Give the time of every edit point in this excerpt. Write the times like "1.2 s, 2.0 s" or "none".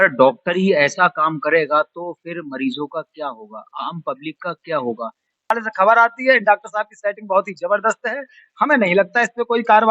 5.5 s